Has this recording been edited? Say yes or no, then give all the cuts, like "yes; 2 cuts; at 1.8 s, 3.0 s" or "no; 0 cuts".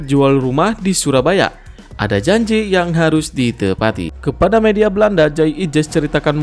yes; 1 cut; at 4.1 s